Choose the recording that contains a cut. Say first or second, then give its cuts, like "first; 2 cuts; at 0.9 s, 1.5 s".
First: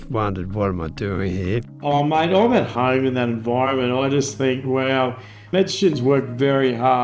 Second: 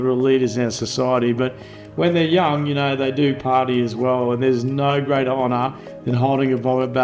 first; 3 cuts; at 1.7 s, 2.7 s, 5.5 s